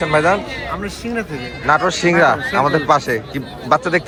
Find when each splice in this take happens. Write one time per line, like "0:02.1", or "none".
none